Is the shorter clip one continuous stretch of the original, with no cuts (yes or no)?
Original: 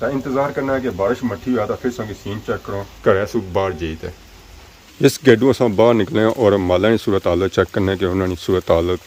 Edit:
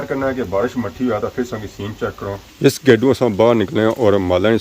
no